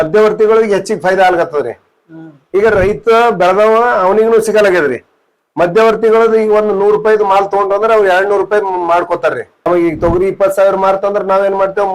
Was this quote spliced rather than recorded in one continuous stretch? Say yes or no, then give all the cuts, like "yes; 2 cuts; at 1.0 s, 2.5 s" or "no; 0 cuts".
yes; 1 cut; at 9.7 s